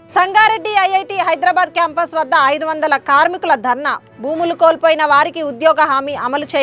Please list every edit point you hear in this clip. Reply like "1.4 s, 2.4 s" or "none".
none